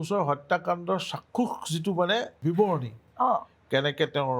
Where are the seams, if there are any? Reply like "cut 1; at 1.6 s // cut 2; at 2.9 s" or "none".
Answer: cut 1; at 2.3 s

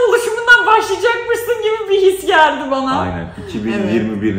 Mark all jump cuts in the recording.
none

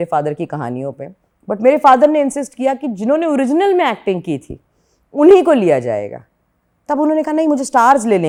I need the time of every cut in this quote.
none

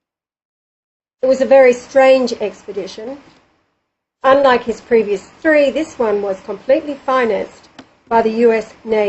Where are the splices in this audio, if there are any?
cut 1; at 2.5 s

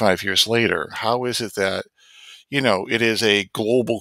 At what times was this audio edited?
cut 1; at 0.9 s

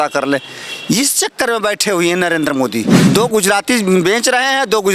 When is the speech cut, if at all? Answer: cut 1; at 2.9 s

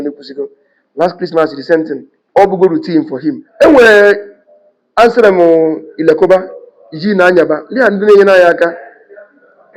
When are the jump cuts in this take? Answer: cut 1; at 3.5 s

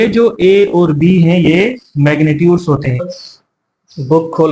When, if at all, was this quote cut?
cut 1; at 3.1 s

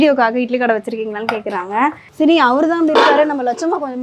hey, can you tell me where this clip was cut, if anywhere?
cut 1; at 2.0 s

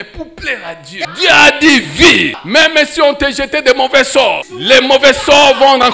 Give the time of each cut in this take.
cut 1; at 1.1 s // cut 2; at 2.4 s // cut 3; at 4.5 s

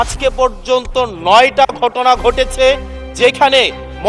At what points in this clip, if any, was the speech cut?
none

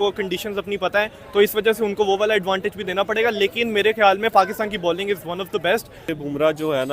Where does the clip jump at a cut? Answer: cut 1; at 6.0 s

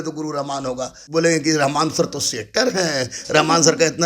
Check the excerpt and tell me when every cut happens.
cut 1; at 0.9 s

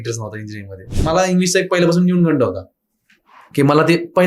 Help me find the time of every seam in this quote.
cut 1; at 1.0 s

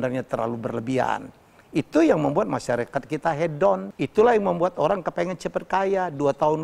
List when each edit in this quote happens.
cut 1; at 3.9 s

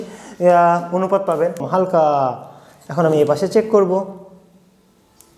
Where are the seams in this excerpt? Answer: cut 1; at 1.6 s

